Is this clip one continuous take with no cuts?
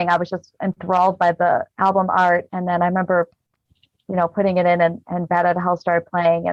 yes; 0 cuts

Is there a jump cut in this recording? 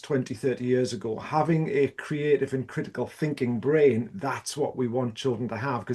no; 0 cuts

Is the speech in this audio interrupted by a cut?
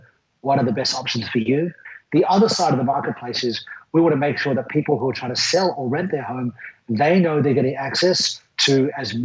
yes; 1 cut; at 1.9 s

